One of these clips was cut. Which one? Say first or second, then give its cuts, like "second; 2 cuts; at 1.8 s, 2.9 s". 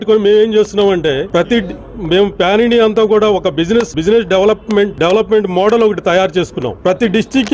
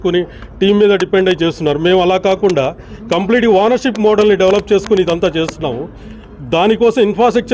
first; 4 cuts; at 1.2 s, 3.9 s, 4.9 s, 6.6 s